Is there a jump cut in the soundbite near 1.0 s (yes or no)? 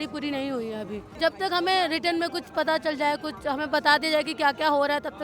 yes